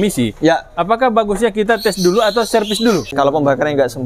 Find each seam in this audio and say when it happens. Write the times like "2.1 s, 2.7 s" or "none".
3.1 s